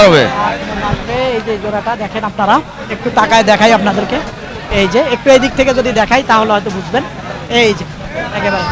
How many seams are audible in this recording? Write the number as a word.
zero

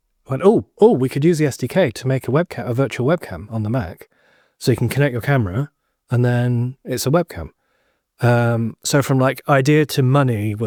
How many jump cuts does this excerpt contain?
zero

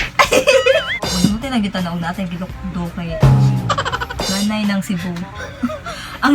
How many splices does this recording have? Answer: two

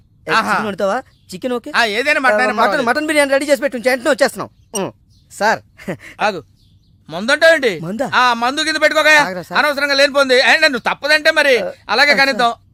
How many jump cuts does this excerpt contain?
zero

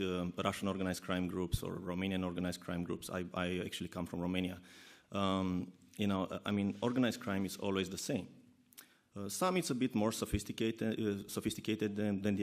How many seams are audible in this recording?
one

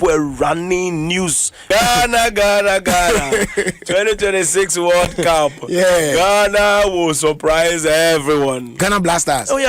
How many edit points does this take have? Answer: two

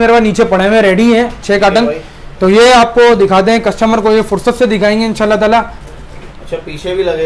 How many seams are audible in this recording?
zero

